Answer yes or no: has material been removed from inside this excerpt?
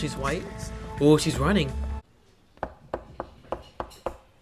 yes